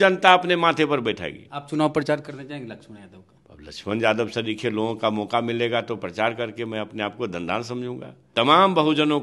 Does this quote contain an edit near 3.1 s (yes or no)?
no